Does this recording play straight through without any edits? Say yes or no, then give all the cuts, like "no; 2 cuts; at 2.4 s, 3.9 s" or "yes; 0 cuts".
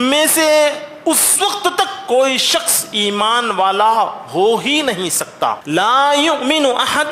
no; 1 cut; at 5.6 s